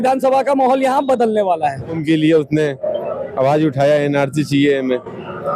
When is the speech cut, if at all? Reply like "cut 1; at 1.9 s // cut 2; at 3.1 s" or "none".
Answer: cut 1; at 2.0 s